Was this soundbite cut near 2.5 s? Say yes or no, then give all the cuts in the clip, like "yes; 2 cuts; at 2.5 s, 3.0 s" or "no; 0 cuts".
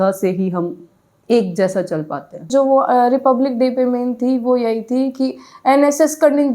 yes; 1 cut; at 2.5 s